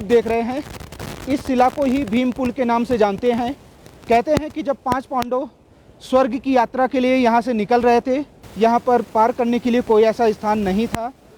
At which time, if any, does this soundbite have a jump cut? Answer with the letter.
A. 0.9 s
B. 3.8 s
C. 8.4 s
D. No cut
C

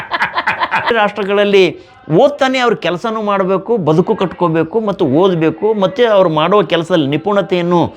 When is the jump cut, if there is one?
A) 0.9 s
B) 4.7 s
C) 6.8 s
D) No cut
A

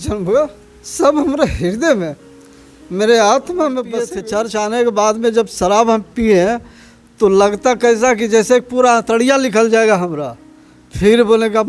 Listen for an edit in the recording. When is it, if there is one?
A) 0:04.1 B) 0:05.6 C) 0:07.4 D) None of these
A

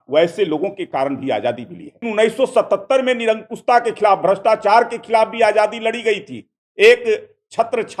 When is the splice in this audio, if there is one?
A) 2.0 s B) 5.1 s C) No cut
A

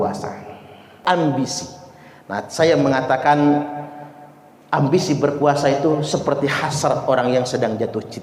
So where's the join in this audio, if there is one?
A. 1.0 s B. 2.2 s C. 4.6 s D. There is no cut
A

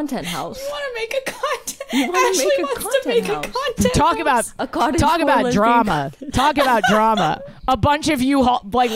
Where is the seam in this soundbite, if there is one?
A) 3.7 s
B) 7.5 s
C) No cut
C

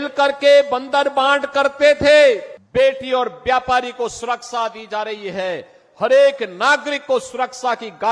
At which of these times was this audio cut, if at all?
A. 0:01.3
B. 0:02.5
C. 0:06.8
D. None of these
B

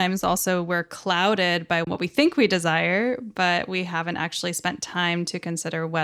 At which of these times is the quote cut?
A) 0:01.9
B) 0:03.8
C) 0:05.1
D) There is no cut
A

